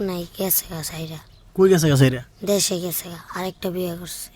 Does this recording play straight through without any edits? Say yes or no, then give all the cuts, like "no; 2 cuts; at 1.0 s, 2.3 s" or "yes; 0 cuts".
yes; 0 cuts